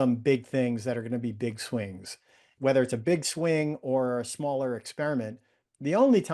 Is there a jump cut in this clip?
yes; 1 cut; at 2.5 s

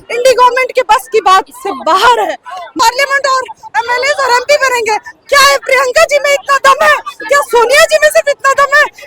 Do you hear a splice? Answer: yes; 1 cut; at 2.7 s

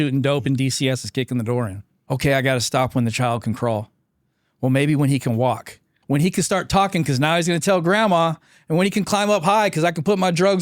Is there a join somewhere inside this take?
yes; 2 cuts; at 2.0 s, 5.9 s

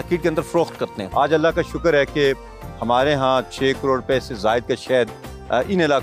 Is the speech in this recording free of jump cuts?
no; 1 cut; at 1.0 s

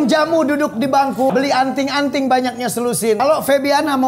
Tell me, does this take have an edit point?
yes; 2 cuts; at 1.3 s, 3.2 s

